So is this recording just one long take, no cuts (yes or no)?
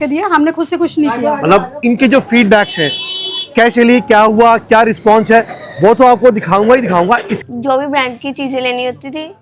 no